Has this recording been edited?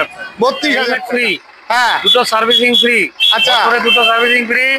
yes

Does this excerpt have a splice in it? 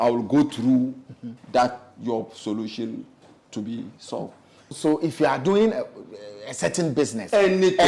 yes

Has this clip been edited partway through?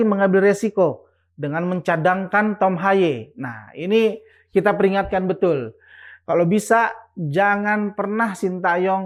no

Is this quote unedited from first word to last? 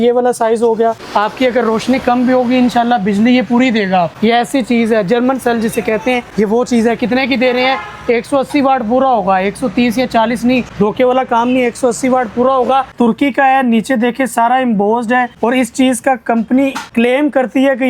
no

